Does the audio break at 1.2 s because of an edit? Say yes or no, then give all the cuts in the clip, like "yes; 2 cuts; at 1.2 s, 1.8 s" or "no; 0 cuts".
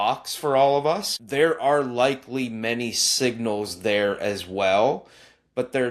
yes; 1 cut; at 1.2 s